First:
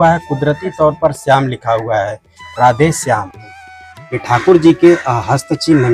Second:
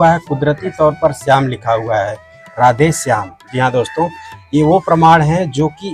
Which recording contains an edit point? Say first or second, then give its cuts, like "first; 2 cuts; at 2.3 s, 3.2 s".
first; 1 cut; at 3.4 s